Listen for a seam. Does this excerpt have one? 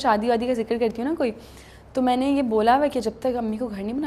no; 0 cuts

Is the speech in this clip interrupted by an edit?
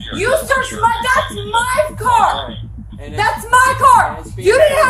yes; 1 cut; at 2.0 s

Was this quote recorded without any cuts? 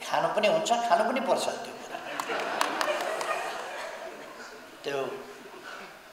yes; 0 cuts

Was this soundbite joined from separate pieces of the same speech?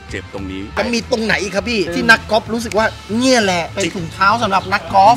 yes; 3 cuts; at 0.8 s, 2.0 s, 3.7 s

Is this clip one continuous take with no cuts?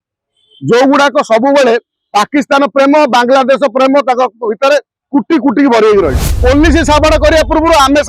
no; 1 cut; at 6.3 s

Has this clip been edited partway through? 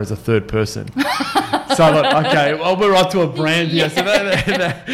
no; 0 cuts

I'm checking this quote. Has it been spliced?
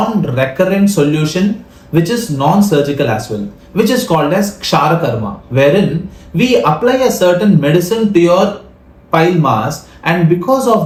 no; 0 cuts

